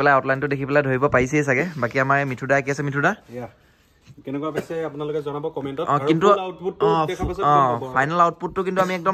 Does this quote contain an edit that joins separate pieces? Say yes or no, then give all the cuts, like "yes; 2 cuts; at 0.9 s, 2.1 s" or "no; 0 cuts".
no; 0 cuts